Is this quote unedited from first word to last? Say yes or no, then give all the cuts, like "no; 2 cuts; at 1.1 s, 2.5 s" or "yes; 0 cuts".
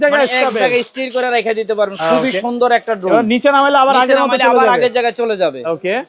yes; 0 cuts